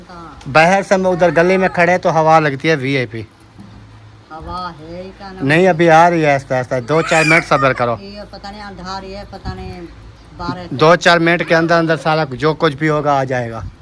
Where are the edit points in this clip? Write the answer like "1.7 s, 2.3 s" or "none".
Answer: none